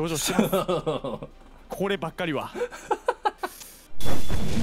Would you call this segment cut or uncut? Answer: uncut